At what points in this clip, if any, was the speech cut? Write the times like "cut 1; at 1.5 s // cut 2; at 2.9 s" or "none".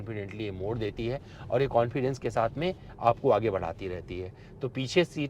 none